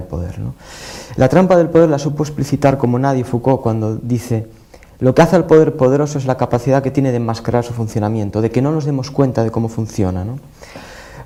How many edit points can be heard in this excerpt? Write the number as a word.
zero